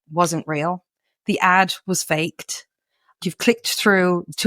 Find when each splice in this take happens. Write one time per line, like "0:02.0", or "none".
0:03.2